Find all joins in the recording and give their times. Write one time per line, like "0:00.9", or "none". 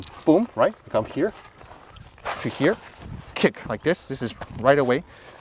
none